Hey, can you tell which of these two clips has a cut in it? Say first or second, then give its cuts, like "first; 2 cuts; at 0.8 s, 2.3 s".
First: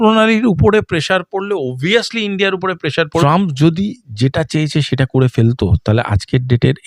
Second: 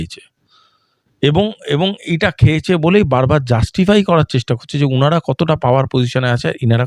first; 1 cut; at 3.2 s